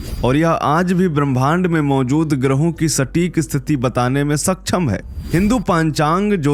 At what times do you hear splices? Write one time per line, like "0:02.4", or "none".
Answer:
none